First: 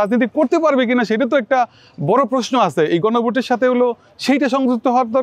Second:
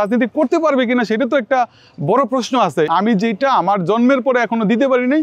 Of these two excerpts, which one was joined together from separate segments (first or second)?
second